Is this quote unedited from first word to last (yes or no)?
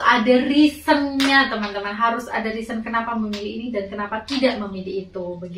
yes